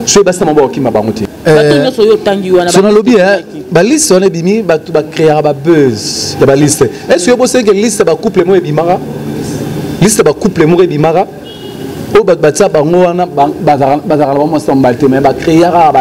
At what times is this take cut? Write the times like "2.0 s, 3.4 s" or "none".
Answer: 1.2 s